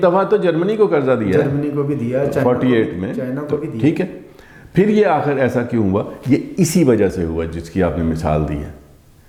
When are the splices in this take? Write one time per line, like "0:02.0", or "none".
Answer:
none